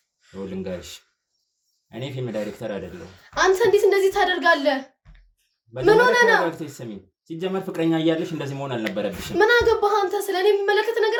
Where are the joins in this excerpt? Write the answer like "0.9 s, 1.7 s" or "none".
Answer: none

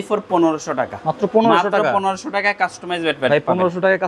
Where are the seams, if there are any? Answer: none

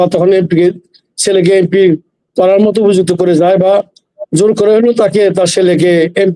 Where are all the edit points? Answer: none

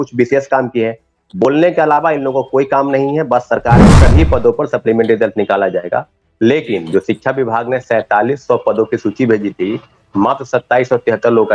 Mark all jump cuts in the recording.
3.9 s

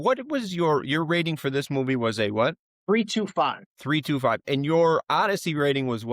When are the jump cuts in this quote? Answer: 2.7 s, 3.7 s

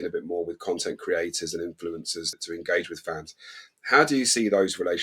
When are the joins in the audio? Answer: 2.4 s

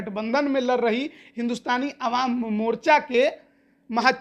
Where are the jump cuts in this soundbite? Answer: none

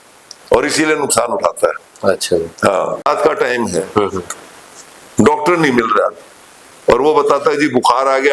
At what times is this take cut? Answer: 3.1 s

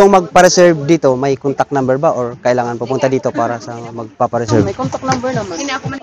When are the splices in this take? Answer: none

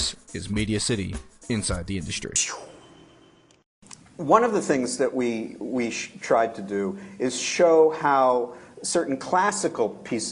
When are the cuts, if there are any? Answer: 3.1 s

